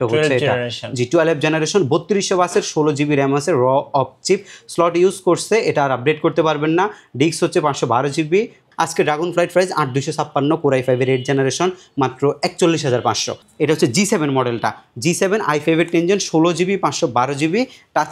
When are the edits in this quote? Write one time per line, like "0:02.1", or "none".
0:08.7
0:13.4